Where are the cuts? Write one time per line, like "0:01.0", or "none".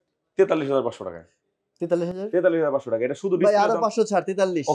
none